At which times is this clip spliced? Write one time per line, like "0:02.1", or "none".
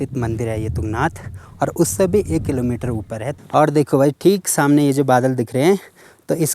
0:03.4